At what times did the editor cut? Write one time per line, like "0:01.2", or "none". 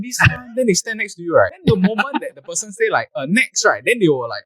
0:01.6

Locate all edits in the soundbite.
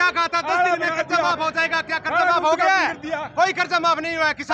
none

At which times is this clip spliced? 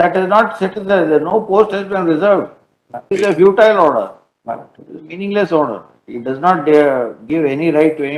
0:03.1

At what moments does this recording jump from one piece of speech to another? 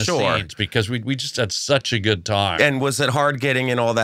0:02.5

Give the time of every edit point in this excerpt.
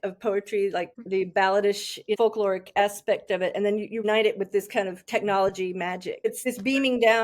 0:00.9
0:02.2
0:04.0
0:06.4

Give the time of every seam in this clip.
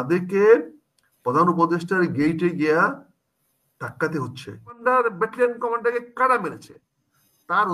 0:04.8

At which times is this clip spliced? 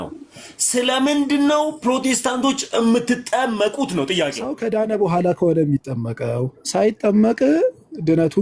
0:04.6

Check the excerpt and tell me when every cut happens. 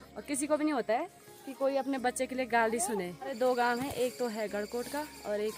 0:03.4

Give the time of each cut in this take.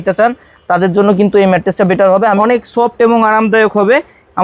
0:02.2

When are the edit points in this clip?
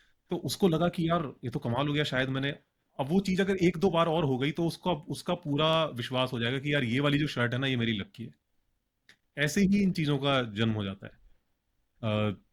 none

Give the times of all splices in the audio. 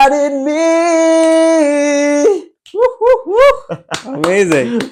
none

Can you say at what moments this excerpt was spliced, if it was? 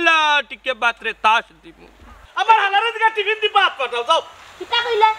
0:02.2

